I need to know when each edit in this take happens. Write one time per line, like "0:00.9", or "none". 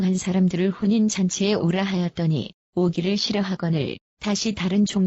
0:04.0